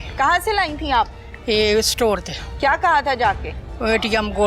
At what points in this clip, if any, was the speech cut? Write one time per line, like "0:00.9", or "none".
none